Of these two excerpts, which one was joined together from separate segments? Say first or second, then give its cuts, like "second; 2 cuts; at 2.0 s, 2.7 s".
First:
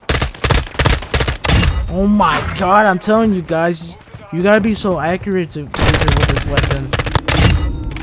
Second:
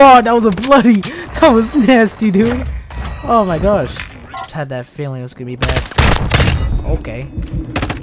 second; 1 cut; at 4.5 s